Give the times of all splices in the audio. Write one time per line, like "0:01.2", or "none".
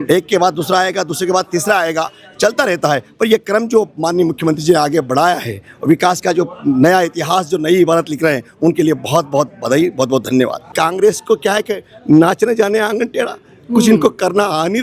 0:10.7